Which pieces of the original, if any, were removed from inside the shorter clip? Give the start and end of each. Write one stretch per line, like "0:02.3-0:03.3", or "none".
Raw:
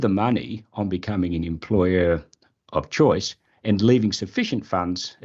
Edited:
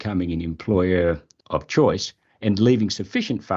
0:02.4-0:02.5